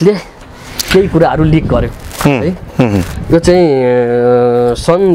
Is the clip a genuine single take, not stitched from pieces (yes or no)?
yes